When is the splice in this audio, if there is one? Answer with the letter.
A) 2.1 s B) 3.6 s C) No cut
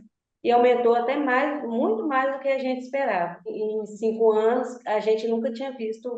B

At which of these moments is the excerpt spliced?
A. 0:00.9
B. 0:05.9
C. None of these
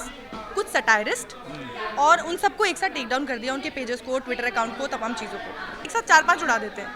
B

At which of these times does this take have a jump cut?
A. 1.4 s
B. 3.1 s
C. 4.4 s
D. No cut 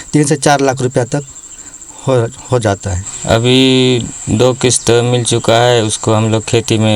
B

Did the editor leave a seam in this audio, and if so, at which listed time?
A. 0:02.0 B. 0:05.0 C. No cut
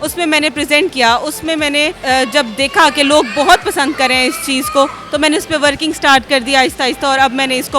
A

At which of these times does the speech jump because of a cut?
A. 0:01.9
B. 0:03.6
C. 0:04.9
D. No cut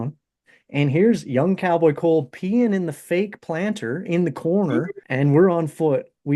C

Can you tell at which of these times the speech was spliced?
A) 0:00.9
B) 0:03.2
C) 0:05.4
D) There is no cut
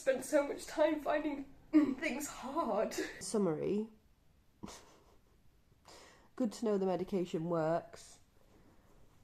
B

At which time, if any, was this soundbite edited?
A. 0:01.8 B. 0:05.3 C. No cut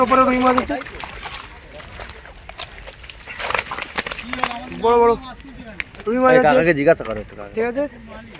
C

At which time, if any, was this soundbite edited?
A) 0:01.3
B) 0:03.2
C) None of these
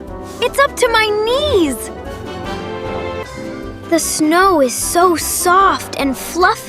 B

